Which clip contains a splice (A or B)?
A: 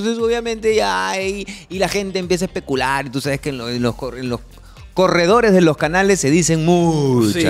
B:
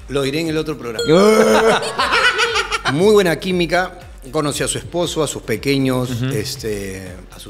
B